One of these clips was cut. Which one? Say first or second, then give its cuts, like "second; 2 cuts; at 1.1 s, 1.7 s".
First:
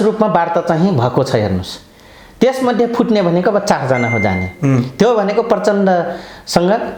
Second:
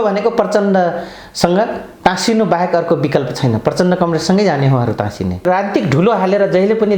second; 1 cut; at 5.4 s